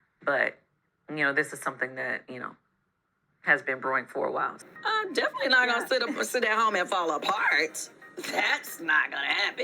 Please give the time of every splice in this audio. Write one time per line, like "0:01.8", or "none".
0:04.6